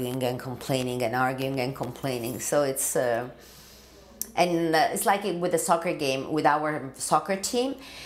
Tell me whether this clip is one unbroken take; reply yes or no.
yes